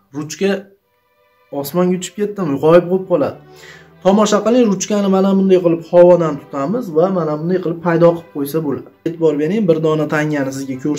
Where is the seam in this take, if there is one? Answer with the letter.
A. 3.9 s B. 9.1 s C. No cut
B